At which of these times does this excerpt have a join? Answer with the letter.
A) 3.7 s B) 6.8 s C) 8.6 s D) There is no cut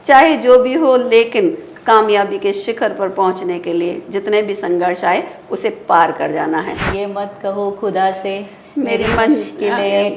B